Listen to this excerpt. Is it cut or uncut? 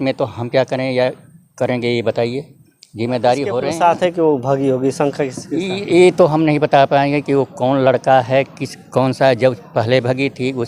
cut